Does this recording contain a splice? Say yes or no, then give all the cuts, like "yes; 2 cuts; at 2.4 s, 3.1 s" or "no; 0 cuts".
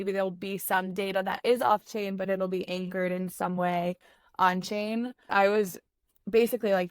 yes; 1 cut; at 5.3 s